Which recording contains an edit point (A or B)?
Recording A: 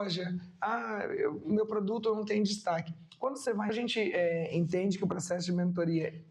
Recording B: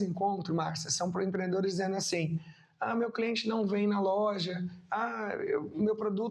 A